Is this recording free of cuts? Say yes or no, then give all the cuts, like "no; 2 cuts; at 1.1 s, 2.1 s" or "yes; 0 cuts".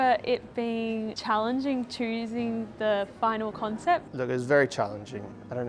no; 2 cuts; at 1.2 s, 4.1 s